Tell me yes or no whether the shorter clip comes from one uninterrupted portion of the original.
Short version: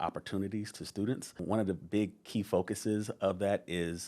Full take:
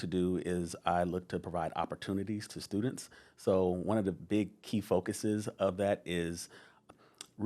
no